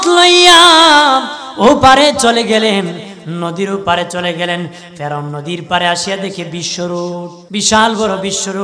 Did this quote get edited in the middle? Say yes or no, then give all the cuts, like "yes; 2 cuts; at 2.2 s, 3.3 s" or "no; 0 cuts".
yes; 1 cut; at 7.4 s